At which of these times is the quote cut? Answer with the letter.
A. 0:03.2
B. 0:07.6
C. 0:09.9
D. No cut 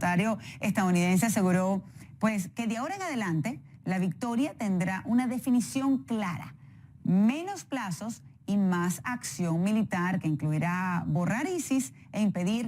B